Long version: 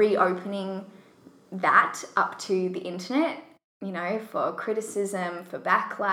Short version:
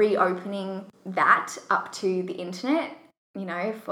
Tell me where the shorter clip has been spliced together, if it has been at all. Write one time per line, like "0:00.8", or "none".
0:00.9